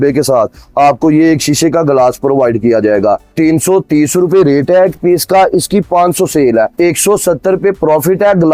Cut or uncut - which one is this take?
uncut